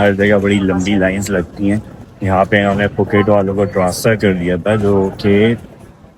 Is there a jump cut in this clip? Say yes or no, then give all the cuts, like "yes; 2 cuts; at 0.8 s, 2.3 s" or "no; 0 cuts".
no; 0 cuts